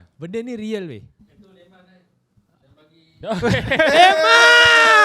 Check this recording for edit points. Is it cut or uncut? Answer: uncut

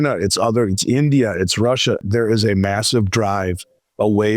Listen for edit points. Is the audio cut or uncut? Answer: cut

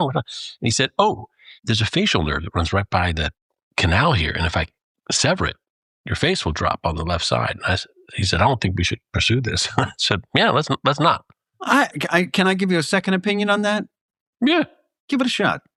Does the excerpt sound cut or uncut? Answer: uncut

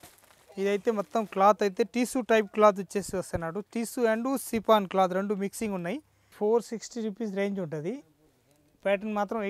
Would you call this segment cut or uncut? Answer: cut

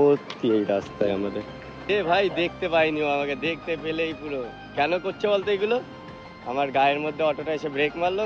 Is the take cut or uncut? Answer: cut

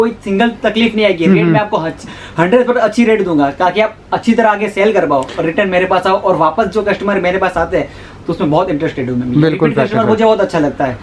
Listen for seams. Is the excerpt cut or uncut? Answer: uncut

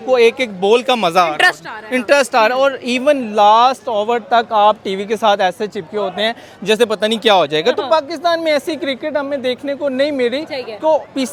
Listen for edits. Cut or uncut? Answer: uncut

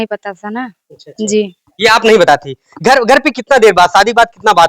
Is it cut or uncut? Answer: uncut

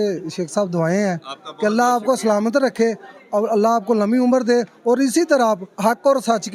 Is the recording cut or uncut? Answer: uncut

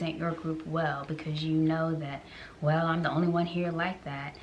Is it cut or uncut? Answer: uncut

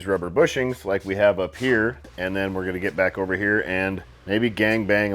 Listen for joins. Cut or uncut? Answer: cut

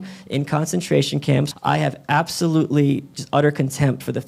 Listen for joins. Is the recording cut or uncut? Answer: cut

